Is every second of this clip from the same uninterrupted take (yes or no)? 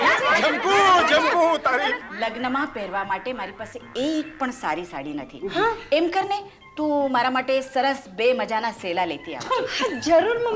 no